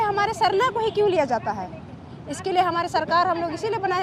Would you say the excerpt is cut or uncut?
uncut